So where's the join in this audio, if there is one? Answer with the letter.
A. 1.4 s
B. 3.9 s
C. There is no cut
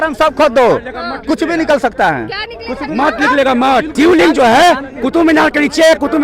B